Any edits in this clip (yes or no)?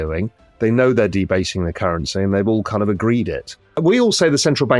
yes